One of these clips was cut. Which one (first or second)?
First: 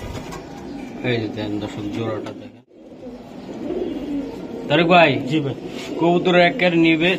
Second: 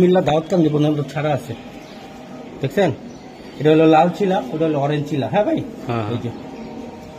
first